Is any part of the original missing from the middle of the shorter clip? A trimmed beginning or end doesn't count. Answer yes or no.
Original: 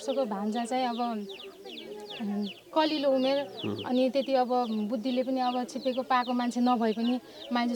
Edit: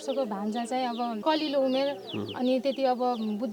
yes